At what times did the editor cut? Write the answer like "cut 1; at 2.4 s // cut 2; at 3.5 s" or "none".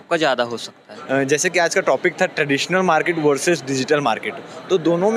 cut 1; at 0.9 s